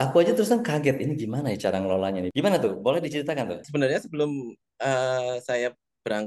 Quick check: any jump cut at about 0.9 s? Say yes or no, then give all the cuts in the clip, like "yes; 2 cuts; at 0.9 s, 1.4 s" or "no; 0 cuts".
no; 2 cuts; at 2.3 s, 3.7 s